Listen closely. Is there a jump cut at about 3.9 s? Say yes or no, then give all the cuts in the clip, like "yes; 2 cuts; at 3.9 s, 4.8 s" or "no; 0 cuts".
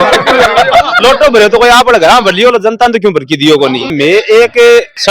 yes; 1 cut; at 3.9 s